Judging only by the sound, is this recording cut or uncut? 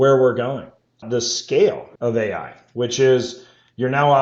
cut